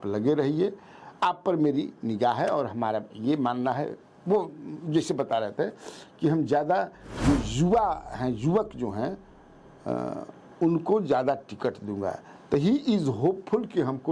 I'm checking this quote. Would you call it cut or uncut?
uncut